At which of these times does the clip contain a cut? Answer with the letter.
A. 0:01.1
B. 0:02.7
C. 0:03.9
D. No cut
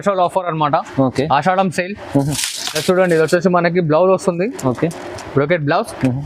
D